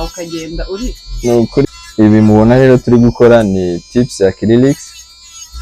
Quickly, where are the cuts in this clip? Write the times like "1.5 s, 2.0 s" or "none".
1.7 s